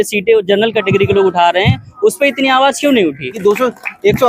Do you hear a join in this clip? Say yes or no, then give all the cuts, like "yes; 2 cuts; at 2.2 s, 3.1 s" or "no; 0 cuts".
yes; 1 cut; at 3.4 s